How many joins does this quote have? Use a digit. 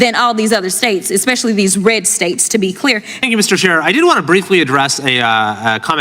1